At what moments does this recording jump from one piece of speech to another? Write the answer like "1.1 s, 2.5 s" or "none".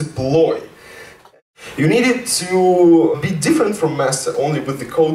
1.2 s, 3.1 s